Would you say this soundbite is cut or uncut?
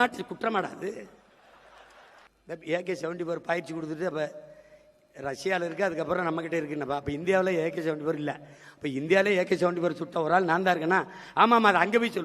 cut